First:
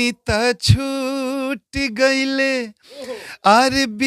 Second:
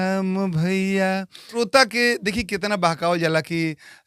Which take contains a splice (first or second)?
second